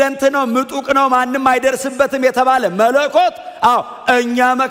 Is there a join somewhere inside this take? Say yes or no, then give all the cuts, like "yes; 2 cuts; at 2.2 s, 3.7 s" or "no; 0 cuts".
no; 0 cuts